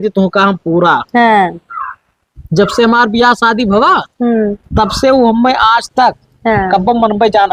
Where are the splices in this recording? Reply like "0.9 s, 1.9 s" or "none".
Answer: none